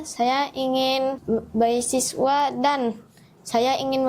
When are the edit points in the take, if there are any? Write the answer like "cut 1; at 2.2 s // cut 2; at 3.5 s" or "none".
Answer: cut 1; at 1.2 s